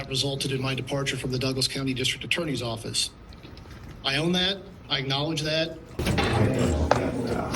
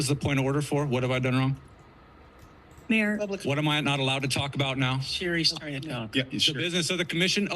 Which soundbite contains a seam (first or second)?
first